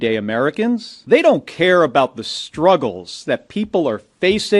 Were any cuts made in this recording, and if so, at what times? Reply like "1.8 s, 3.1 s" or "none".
0.9 s